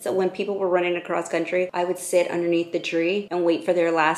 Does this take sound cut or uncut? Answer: cut